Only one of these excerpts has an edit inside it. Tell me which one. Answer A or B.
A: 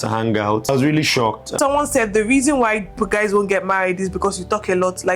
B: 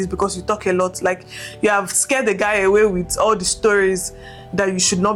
A